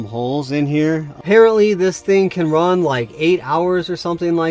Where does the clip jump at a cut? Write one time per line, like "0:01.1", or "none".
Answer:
0:01.1